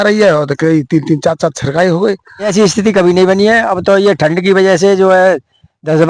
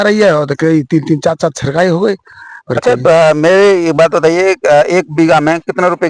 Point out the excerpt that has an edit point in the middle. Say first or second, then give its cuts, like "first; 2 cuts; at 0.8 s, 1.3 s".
first; 1 cut; at 2.5 s